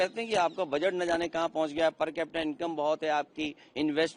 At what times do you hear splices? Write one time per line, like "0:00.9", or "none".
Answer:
none